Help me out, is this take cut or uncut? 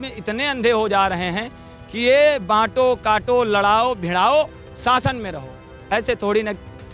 uncut